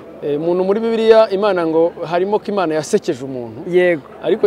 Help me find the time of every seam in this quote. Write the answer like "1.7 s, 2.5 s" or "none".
none